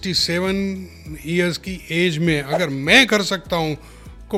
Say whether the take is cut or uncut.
uncut